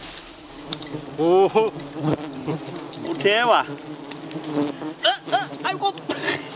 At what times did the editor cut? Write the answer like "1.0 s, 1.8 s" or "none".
4.7 s